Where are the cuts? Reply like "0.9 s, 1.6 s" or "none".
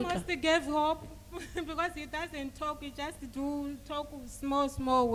none